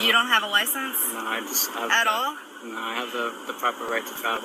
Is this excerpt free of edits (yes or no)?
yes